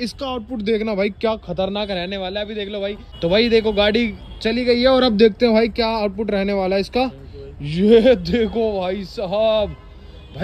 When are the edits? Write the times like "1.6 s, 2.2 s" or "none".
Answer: none